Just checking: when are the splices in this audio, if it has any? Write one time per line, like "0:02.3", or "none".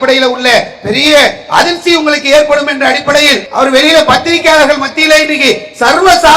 0:03.4